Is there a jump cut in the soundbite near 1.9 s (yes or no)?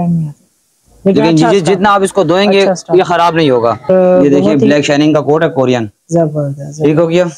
no